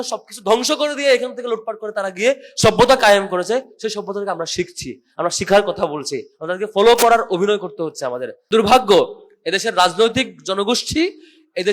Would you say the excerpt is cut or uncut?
cut